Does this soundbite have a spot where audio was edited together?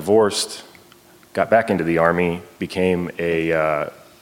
no; 0 cuts

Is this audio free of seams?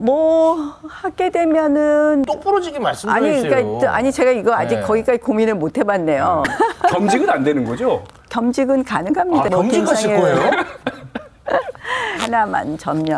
no; 4 cuts; at 2.2 s, 6.5 s, 9.5 s, 12.2 s

